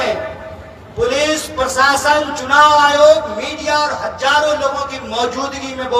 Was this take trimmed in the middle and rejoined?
no; 0 cuts

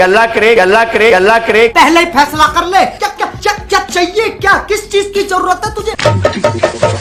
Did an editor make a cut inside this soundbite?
no; 0 cuts

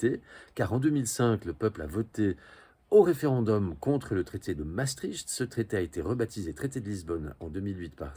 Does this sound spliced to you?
no; 0 cuts

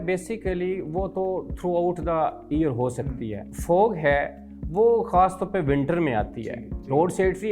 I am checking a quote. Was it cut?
yes; 2 cuts; at 3.5 s, 6.4 s

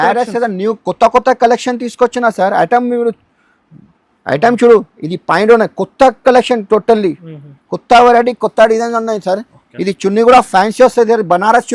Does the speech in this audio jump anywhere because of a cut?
no; 0 cuts

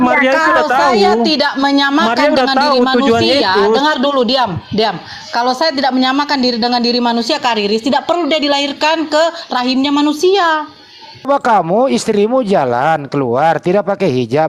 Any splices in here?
yes; 1 cut; at 11.3 s

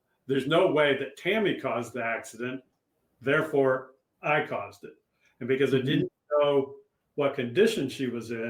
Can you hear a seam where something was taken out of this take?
no; 0 cuts

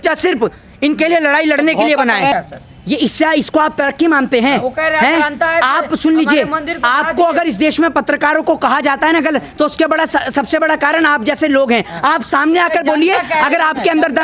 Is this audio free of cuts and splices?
no; 1 cut; at 2.3 s

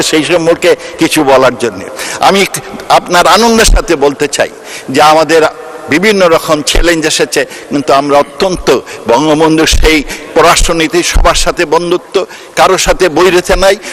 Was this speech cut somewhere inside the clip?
no; 0 cuts

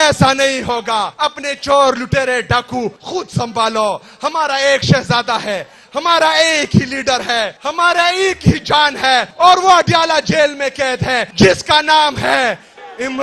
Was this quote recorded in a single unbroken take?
no; 5 cuts; at 1.1 s, 3.0 s, 7.6 s, 9.3 s, 11.3 s

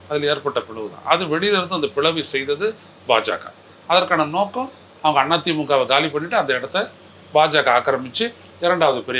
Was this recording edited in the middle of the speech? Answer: no; 0 cuts

